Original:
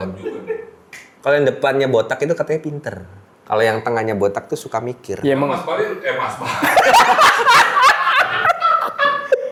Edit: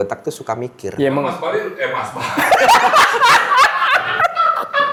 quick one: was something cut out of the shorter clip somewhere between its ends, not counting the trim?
no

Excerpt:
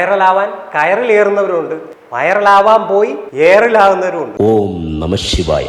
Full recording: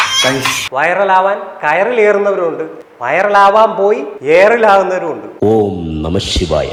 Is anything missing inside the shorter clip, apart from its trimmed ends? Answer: yes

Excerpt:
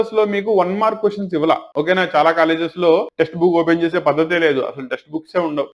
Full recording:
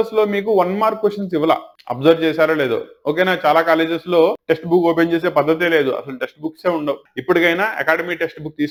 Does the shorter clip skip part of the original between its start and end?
yes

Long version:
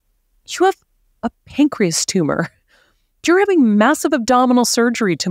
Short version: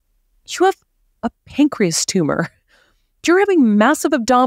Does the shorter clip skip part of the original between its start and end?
no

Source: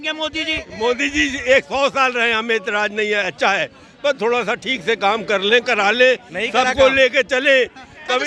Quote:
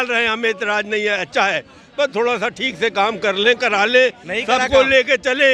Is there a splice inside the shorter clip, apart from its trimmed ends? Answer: no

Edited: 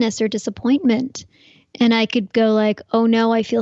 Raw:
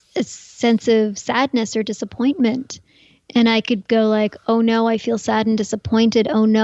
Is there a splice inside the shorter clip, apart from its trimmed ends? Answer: no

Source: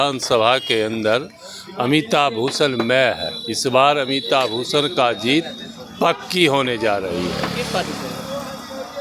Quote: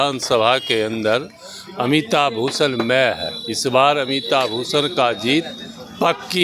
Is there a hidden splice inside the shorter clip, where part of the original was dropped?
no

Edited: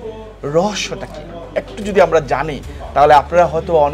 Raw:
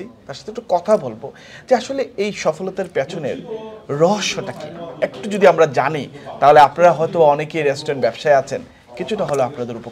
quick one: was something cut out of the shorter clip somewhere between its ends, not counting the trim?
no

